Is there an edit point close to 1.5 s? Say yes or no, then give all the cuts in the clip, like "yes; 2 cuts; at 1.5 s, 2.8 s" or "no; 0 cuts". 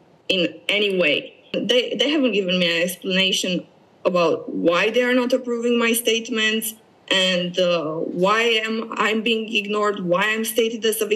yes; 1 cut; at 1.5 s